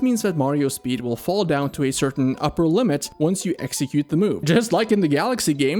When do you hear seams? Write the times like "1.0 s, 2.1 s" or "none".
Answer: 4.4 s